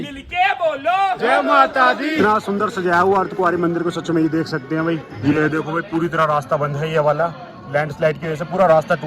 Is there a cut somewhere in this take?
yes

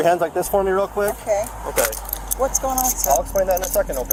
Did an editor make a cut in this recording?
no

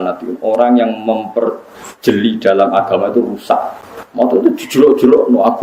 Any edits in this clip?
yes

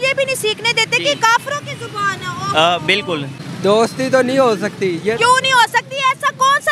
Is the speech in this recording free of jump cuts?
no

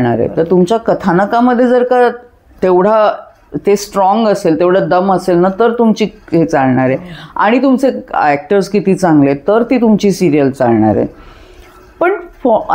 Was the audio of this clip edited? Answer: no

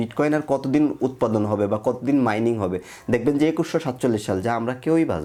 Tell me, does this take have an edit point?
no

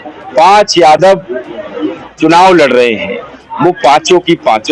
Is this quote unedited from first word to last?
yes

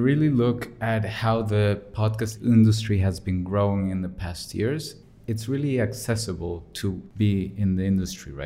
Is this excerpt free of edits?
no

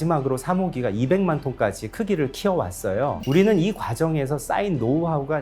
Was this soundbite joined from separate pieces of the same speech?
yes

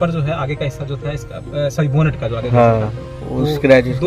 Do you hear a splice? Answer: no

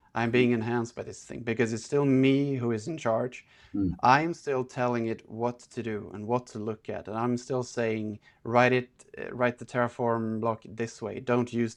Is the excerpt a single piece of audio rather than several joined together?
yes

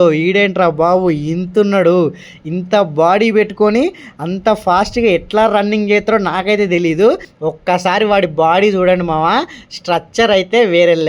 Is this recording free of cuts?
no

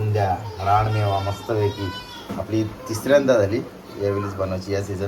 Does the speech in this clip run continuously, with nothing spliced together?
yes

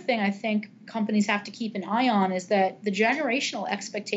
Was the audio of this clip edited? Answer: no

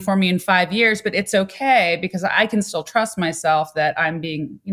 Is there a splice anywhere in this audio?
no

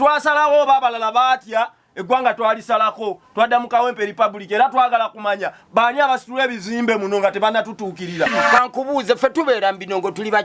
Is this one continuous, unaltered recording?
no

